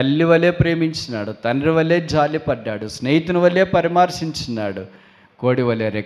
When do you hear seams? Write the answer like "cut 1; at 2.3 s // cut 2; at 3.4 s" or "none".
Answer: none